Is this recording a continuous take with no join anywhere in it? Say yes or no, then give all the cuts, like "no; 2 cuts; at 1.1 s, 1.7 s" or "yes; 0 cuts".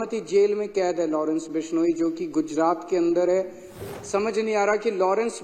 no; 1 cut; at 3.8 s